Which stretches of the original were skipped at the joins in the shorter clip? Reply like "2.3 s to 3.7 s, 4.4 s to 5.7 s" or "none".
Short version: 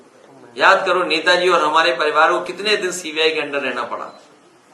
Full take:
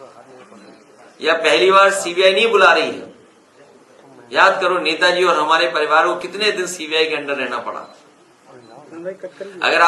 none